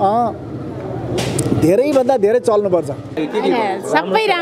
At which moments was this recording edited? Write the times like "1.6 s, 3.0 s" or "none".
3.1 s